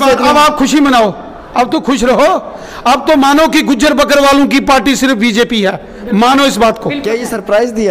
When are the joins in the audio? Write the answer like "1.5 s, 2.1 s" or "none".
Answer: none